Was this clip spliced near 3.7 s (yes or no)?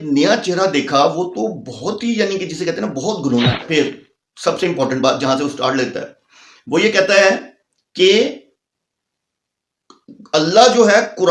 yes